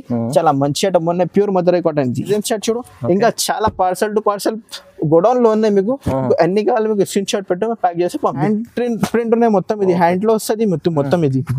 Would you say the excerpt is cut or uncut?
cut